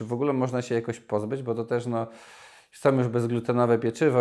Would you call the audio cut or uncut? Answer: uncut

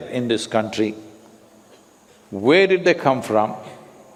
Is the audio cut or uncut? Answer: uncut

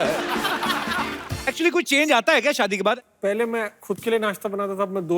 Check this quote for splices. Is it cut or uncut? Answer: cut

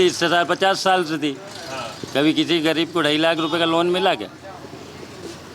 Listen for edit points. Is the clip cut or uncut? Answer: uncut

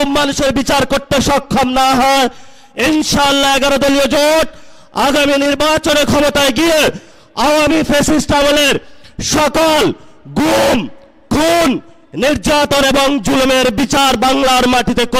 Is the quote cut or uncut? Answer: uncut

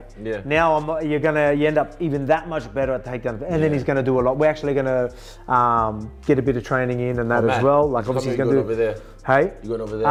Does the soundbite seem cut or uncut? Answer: uncut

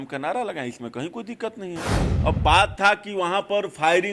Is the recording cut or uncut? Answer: cut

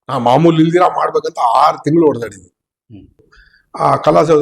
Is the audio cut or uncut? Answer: cut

